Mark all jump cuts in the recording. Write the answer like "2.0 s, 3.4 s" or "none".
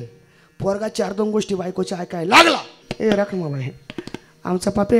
2.9 s